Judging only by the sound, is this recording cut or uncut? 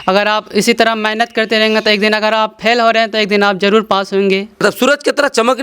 cut